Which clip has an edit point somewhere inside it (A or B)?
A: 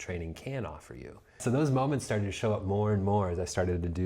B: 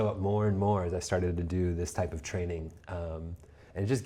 A